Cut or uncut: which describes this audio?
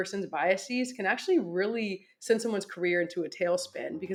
uncut